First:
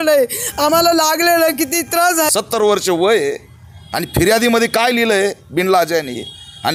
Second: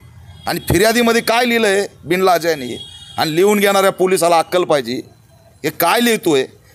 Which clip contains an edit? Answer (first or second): first